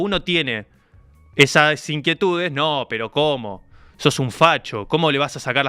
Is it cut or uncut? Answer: uncut